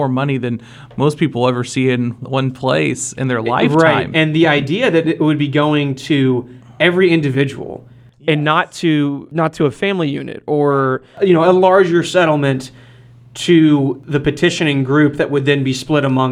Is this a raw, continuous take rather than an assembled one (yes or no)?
no